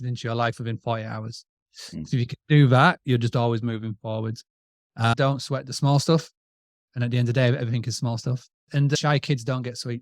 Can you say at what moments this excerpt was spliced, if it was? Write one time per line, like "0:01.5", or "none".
0:05.2
0:08.8